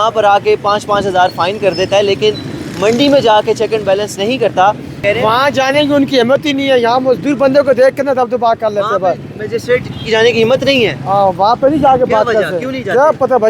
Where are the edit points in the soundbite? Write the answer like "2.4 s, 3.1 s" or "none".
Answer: 5.0 s